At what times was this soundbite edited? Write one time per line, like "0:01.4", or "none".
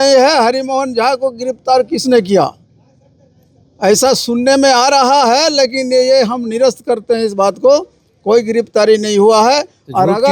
none